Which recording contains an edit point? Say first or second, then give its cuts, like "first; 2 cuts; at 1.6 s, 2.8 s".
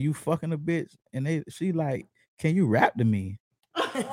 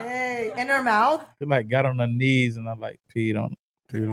second; 1 cut; at 1.3 s